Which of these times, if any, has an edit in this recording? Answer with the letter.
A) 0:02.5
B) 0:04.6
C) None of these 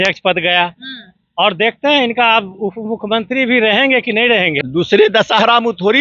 B